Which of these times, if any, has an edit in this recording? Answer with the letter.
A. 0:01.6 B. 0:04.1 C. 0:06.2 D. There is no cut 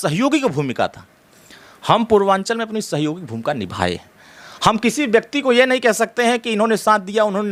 D